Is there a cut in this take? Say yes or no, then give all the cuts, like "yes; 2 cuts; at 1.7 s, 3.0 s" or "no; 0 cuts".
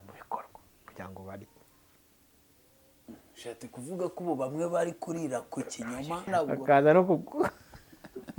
yes; 1 cut; at 6.3 s